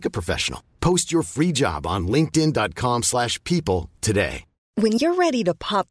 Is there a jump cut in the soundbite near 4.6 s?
yes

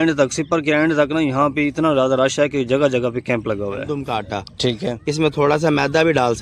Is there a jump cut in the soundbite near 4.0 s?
yes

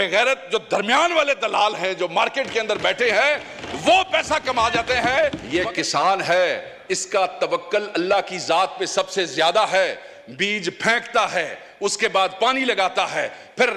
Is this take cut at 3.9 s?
no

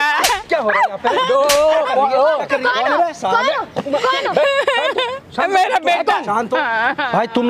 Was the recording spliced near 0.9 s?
no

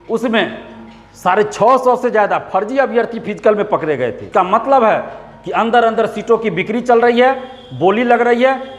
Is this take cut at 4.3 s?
yes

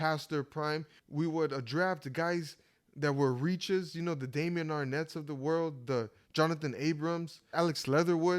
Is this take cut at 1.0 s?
yes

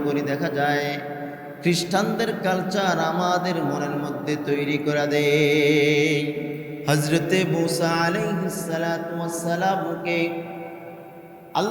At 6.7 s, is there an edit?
yes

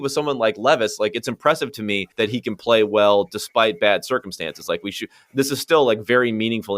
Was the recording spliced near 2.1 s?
yes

